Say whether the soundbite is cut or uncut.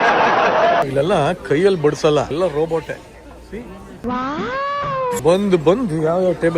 cut